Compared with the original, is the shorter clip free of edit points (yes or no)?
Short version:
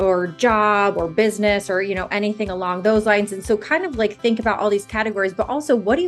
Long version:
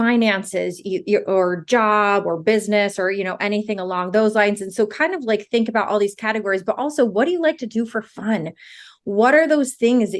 yes